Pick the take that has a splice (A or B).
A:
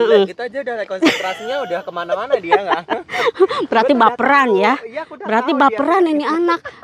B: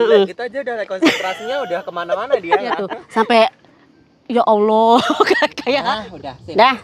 B